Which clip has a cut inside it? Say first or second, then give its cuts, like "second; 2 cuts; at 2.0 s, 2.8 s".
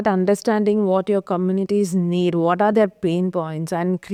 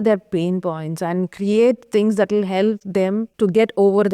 second; 1 cut; at 2.9 s